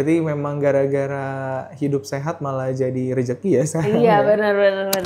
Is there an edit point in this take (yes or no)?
no